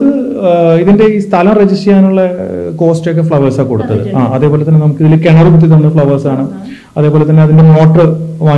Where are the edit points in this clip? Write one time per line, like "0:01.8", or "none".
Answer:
none